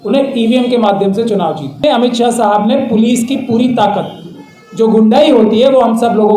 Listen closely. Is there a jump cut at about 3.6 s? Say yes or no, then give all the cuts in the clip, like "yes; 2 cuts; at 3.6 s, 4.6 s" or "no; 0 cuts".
no; 1 cut; at 1.8 s